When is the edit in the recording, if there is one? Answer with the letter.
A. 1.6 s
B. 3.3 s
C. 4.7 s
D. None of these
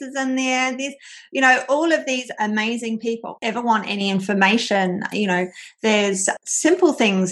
B